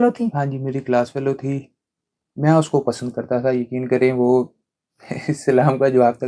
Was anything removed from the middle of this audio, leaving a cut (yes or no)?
no